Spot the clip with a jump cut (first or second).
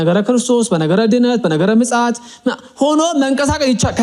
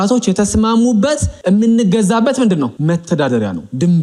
second